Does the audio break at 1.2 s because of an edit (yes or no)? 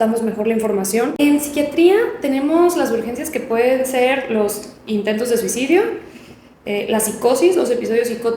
yes